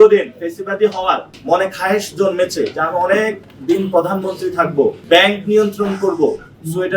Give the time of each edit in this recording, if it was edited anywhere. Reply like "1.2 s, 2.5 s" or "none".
5.0 s